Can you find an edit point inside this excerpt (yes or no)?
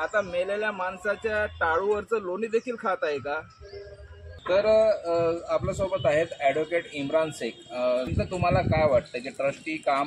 no